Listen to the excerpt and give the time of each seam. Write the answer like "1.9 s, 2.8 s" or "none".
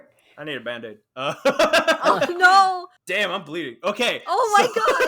3.2 s